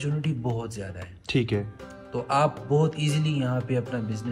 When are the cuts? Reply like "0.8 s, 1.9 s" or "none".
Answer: none

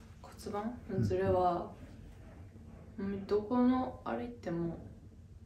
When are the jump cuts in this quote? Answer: none

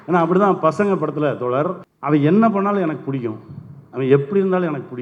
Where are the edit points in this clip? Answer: 1.9 s

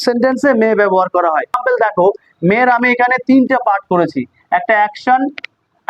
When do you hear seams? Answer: 1.6 s

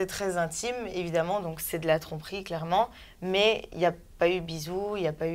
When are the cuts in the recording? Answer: none

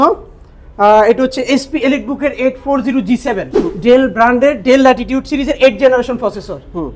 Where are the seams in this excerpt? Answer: 3.6 s

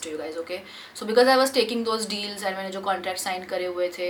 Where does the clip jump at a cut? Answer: none

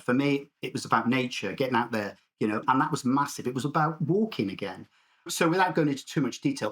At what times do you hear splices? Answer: 2.6 s, 5.3 s

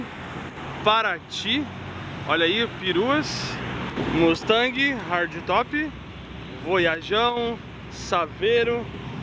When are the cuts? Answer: none

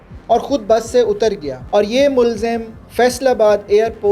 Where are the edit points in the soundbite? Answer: 1.5 s

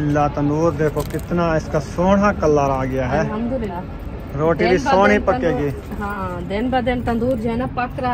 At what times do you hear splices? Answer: 3.7 s, 6.2 s

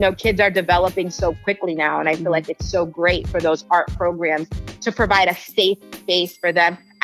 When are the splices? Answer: none

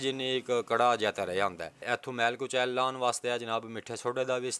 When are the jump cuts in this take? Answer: 1.7 s

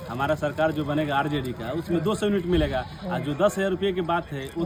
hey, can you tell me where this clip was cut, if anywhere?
none

